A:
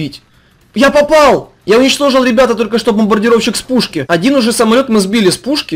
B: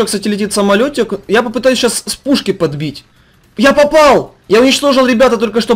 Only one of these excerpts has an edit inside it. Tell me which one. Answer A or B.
A